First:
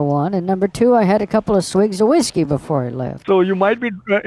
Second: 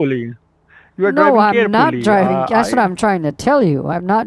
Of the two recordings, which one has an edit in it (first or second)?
first